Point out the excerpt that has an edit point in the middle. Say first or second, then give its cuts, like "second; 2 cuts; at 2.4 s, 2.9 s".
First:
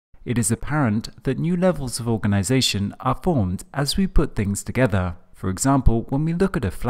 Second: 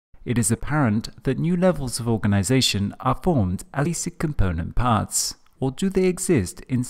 first; 1 cut; at 3.9 s